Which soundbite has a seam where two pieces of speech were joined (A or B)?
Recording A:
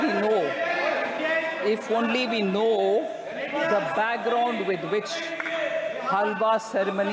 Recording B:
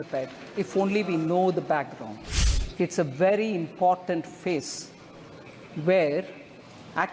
B